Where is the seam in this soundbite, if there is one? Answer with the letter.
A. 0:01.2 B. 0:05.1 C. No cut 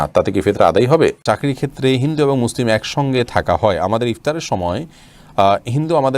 A